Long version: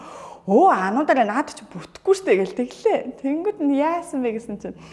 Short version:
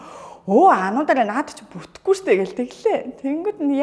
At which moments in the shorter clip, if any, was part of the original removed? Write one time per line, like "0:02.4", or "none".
none